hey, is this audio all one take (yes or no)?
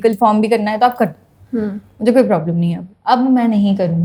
yes